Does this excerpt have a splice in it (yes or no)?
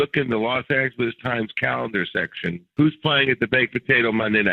yes